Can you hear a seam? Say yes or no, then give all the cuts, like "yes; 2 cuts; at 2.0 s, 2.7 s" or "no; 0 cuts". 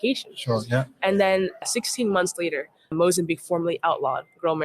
yes; 2 cuts; at 1.6 s, 2.8 s